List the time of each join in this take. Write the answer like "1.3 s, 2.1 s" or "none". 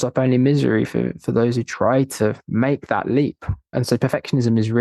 3.7 s